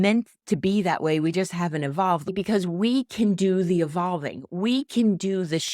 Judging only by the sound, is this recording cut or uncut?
cut